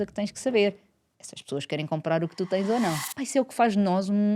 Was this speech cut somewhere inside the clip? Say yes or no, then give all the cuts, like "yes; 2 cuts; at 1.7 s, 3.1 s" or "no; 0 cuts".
yes; 1 cut; at 3.1 s